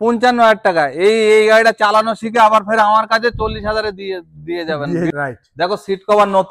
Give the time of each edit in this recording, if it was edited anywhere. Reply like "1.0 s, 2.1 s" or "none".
5.1 s